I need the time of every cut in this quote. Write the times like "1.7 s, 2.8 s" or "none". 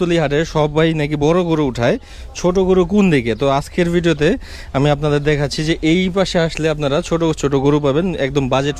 none